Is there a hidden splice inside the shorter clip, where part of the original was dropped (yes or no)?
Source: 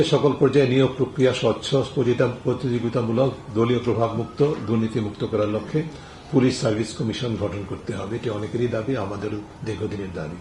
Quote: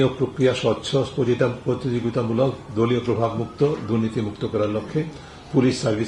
no